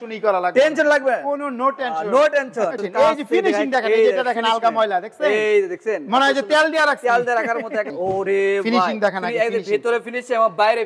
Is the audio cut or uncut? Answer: cut